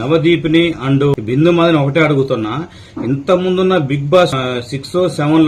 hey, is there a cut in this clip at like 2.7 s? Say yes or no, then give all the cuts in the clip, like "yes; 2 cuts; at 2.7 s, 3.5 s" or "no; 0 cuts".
no; 2 cuts; at 1.1 s, 4.3 s